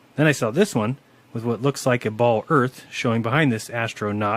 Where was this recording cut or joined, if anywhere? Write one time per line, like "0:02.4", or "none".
0:03.3